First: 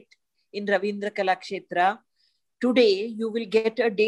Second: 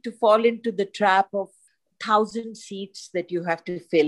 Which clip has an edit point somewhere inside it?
second; 1 cut; at 1.6 s

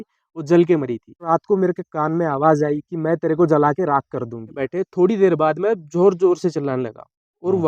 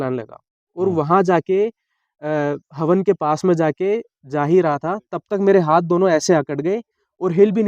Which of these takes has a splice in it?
first; 2 cuts; at 1.3 s, 4.6 s

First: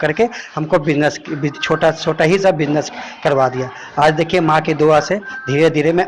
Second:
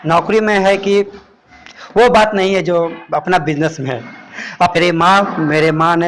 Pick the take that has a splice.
second; 1 cut; at 4.7 s

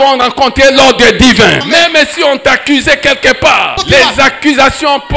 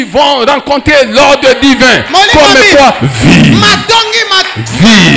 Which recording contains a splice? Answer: first; 2 cuts; at 1.6 s, 3.8 s

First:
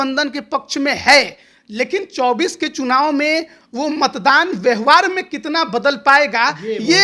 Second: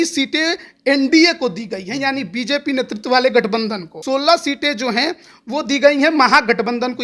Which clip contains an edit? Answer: second; 1 cut; at 4.0 s

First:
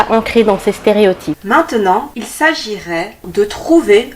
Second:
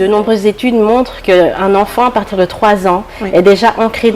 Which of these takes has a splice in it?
first; 2 cuts; at 1.4 s, 2.2 s

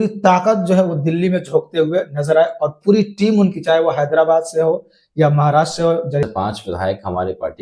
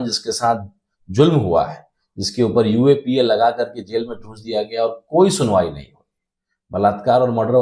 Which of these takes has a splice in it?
first; 1 cut; at 6.2 s

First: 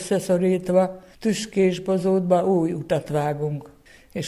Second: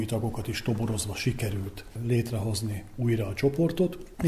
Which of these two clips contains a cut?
first; 1 cut; at 1.1 s

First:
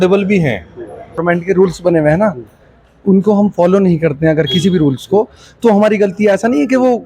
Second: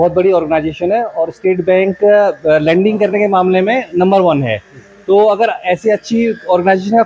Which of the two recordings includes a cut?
first; 1 cut; at 1.2 s

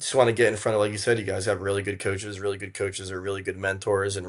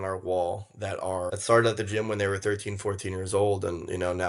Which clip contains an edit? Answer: second; 1 cut; at 1.4 s

